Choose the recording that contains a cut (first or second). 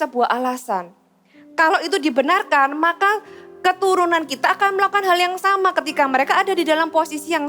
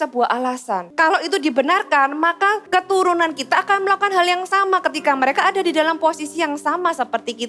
second